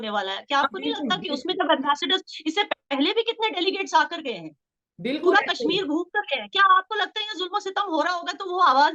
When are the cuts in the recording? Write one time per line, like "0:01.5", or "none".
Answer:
none